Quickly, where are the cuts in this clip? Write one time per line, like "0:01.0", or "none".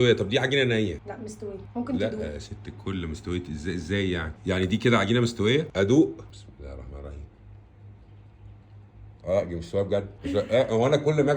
0:04.3
0:05.7
0:06.3
0:09.2
0:10.2